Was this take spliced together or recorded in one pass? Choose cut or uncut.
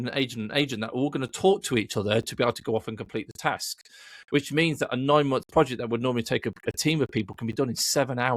uncut